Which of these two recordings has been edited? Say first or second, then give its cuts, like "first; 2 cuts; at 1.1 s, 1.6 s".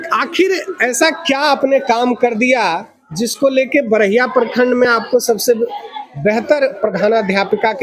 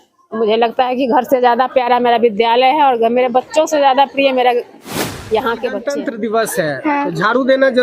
second; 1 cut; at 5.9 s